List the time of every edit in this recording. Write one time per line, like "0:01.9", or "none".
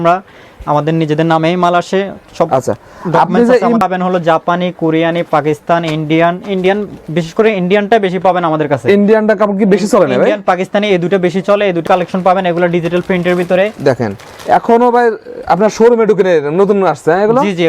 0:03.8
0:11.8